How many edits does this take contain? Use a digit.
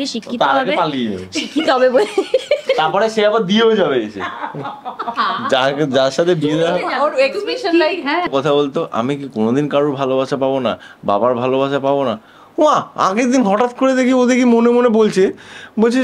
1